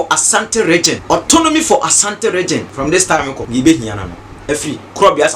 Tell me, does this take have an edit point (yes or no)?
yes